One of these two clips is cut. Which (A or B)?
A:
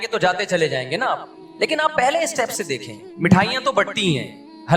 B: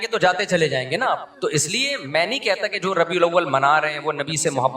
B